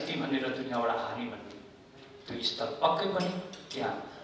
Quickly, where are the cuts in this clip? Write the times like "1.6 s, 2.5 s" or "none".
none